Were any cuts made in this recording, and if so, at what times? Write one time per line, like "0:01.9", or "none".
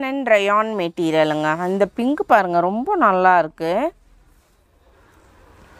none